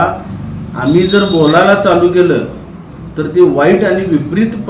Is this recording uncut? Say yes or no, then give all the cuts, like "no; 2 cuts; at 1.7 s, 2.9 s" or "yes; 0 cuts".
yes; 0 cuts